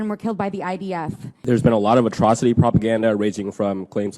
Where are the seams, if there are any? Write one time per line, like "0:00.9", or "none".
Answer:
0:01.3